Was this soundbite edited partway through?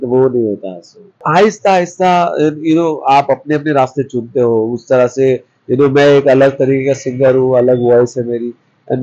yes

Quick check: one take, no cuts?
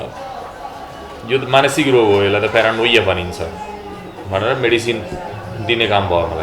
yes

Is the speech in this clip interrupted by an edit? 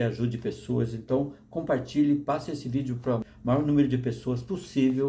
yes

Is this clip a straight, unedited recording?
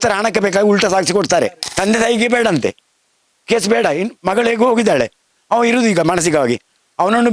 no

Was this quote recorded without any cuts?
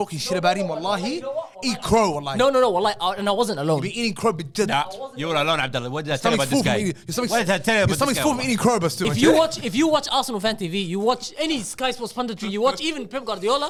yes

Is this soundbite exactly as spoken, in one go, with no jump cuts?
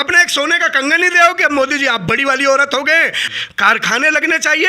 no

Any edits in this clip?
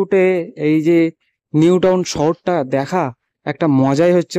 no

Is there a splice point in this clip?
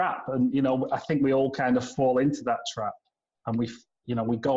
no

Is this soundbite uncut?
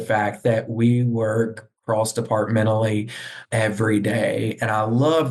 yes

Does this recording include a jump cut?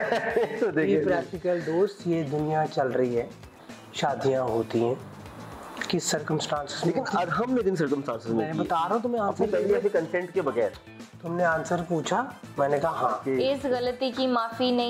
yes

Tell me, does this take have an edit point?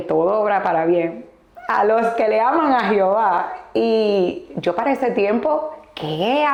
no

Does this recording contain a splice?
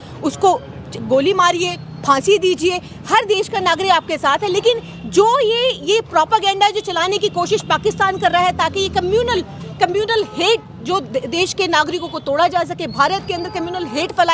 no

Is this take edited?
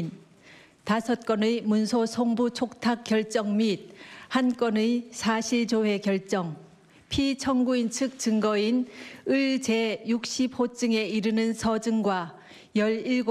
yes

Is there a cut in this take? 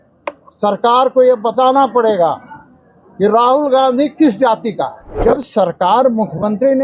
yes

